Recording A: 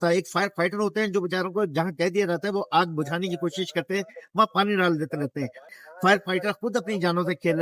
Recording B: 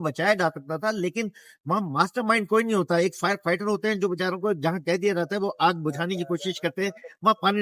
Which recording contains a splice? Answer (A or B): A